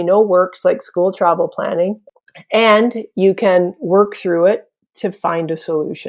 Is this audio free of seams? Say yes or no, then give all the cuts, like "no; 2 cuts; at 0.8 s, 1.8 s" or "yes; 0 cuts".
no; 1 cut; at 2.0 s